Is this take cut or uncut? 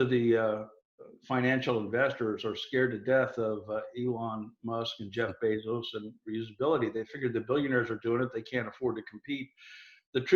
uncut